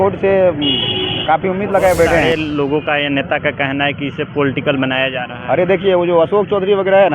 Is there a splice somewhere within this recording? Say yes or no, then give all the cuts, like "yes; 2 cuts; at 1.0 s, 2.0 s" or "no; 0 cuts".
yes; 1 cut; at 2.2 s